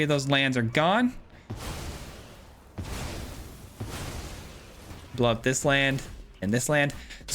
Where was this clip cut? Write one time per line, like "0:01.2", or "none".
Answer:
0:04.8